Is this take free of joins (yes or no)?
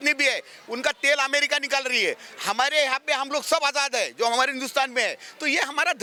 yes